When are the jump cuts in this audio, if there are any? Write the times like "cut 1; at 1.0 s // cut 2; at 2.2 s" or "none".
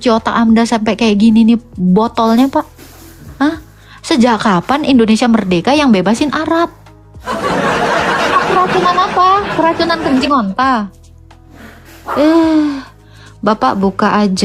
none